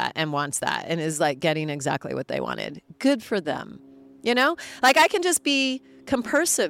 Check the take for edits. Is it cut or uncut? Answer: uncut